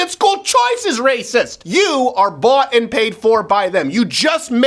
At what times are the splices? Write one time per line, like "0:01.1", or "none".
0:01.6

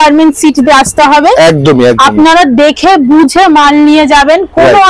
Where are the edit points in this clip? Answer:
none

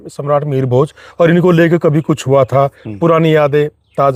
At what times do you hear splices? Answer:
none

